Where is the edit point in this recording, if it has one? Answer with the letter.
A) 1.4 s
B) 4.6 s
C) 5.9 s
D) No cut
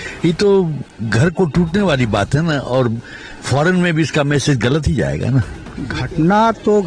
C